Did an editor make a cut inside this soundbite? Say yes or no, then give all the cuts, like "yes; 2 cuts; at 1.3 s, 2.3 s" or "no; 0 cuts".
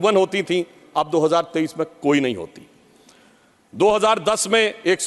no; 0 cuts